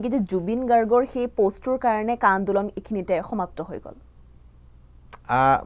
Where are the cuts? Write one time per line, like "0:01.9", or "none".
none